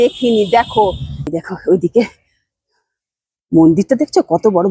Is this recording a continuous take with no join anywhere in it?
no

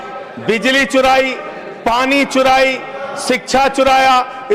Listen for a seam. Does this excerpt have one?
no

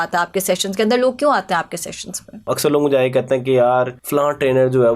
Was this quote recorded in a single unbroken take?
no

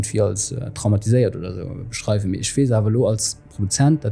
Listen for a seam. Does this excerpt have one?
no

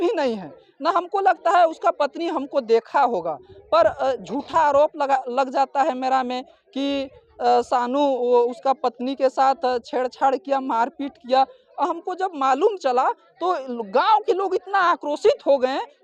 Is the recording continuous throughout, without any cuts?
yes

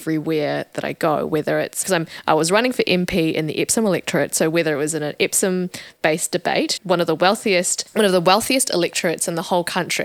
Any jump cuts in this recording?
no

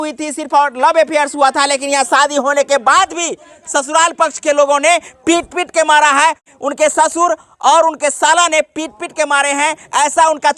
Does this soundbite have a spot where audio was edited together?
yes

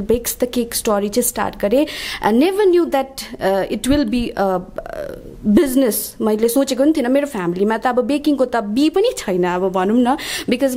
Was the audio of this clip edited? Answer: no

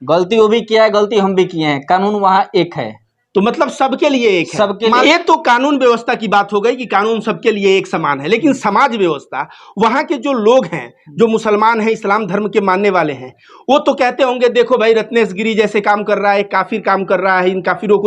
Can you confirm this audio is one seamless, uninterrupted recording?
no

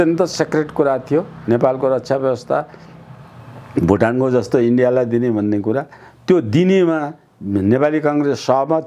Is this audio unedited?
yes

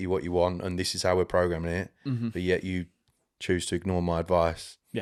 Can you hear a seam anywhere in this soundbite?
no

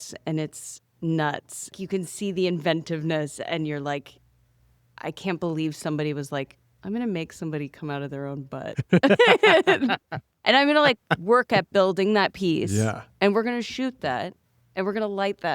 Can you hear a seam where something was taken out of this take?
yes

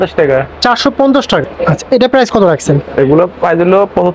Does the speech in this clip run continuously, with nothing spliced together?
no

